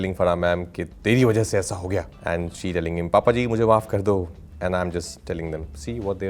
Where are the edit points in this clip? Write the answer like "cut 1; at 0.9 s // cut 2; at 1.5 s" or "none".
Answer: cut 1; at 2.1 s